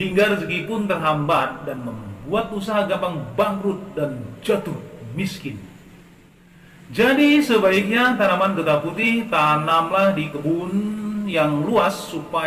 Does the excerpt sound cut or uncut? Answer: uncut